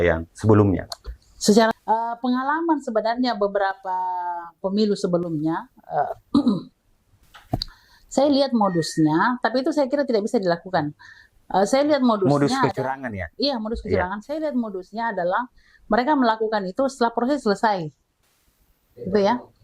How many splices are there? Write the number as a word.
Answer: one